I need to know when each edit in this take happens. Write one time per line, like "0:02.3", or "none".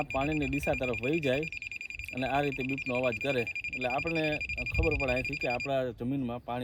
none